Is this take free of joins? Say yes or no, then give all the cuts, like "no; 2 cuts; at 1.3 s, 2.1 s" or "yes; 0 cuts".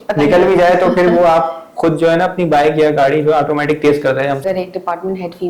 no; 1 cut; at 4.4 s